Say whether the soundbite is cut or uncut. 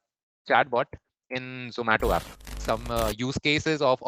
cut